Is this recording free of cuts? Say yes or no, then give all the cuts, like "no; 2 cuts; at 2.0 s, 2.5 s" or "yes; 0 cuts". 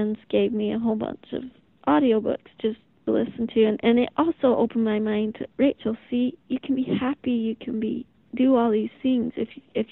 no; 1 cut; at 3.0 s